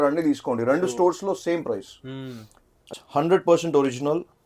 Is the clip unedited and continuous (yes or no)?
no